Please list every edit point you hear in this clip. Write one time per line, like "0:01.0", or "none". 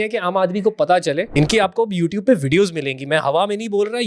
0:01.3